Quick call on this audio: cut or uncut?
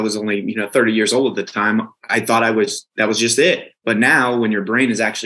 cut